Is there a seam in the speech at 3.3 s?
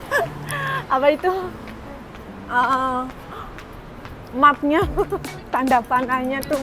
no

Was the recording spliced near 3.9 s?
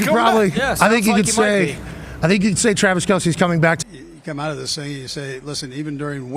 yes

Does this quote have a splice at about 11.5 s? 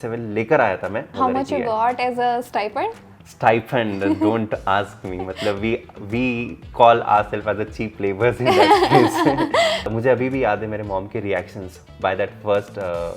no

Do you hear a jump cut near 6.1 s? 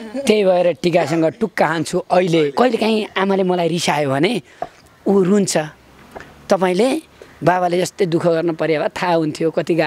no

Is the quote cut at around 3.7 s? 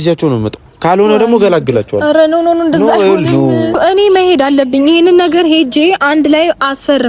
yes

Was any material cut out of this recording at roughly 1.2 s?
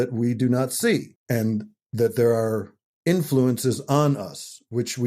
yes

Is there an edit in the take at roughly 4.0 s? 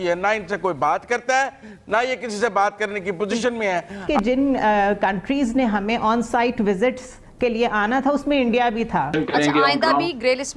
yes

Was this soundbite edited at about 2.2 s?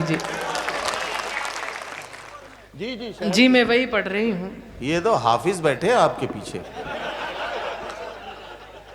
yes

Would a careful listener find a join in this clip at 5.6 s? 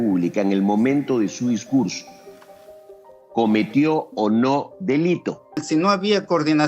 yes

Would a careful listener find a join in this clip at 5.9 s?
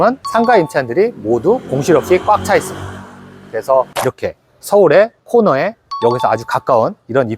no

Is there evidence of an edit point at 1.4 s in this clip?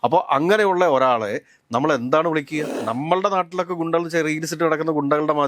no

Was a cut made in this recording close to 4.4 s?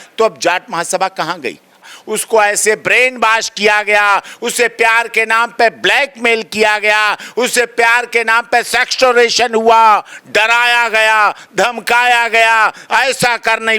no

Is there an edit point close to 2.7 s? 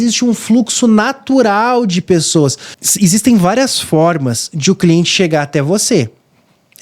yes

